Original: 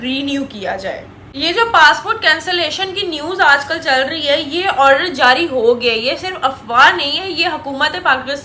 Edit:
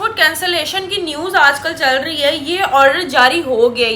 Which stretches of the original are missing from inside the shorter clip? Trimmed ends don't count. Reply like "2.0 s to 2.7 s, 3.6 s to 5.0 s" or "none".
none